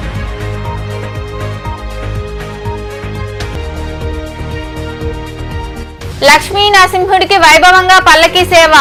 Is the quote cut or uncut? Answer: uncut